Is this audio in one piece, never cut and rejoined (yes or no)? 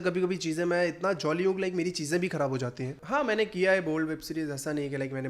no